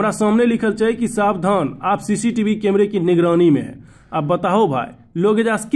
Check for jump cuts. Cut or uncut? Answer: uncut